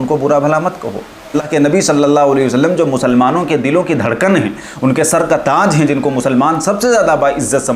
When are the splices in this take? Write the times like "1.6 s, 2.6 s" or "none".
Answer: 1.4 s

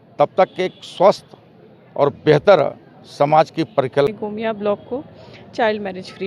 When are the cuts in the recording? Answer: 4.1 s

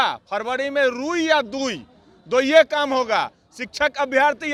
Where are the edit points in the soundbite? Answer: none

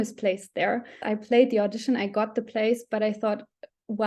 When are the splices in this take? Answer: 1.1 s

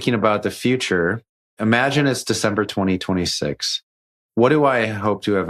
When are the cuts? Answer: 1.5 s, 4.2 s

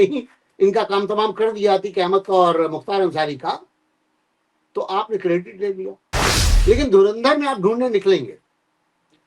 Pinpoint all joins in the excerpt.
6.4 s

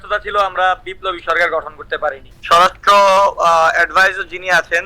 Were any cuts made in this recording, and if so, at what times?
2.3 s

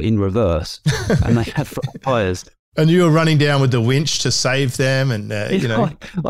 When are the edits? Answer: 2.6 s

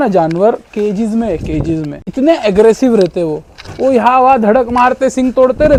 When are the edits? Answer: none

